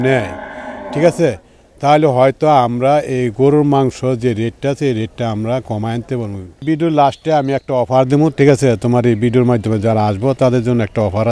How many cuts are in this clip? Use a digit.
1